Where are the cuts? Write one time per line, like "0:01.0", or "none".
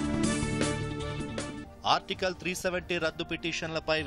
0:01.7